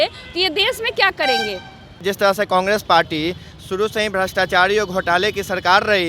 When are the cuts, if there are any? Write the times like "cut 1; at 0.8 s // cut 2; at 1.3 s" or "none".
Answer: cut 1; at 2.0 s

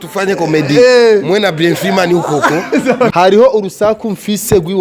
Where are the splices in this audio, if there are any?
cut 1; at 3.1 s

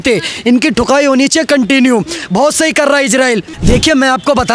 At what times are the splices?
cut 1; at 3.5 s

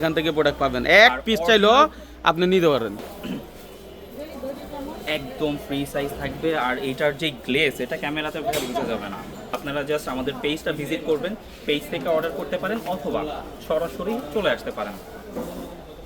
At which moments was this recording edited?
cut 1; at 3.0 s // cut 2; at 9.4 s

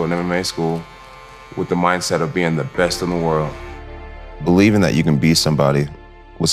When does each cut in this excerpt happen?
cut 1; at 3.9 s

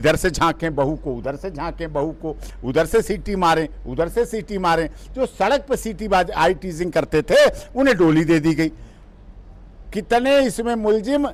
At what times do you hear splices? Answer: none

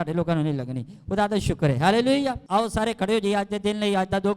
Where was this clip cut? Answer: cut 1; at 2.4 s

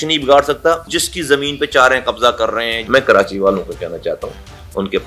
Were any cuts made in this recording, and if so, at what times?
cut 1; at 1.0 s // cut 2; at 2.8 s

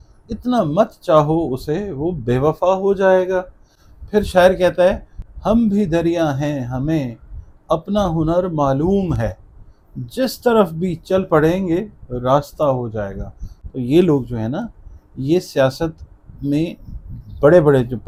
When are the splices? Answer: none

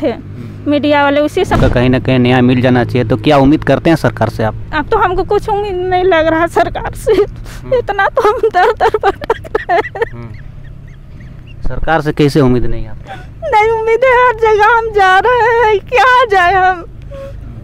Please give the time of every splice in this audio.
cut 1; at 1.6 s

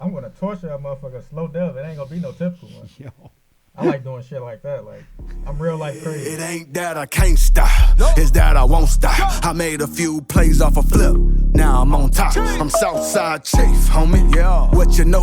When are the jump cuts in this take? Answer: cut 1; at 6.2 s

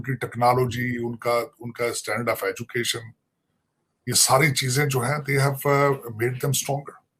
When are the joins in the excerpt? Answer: none

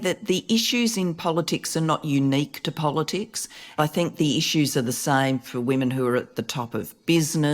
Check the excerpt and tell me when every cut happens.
cut 1; at 3.8 s

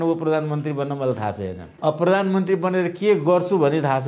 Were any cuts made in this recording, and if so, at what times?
cut 1; at 1.6 s

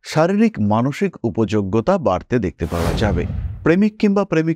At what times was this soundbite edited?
cut 1; at 3.4 s

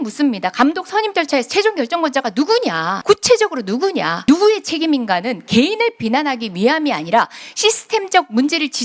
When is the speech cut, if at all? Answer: cut 1; at 2.9 s // cut 2; at 4.1 s

